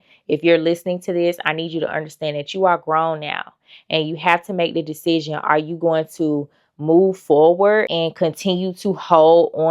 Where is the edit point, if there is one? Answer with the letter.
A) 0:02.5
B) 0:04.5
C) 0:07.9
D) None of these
C